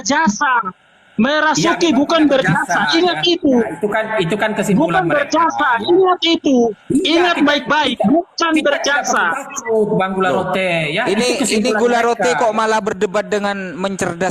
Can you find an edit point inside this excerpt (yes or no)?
no